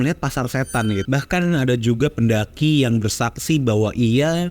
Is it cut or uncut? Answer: cut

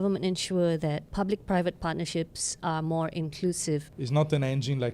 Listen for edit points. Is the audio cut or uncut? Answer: cut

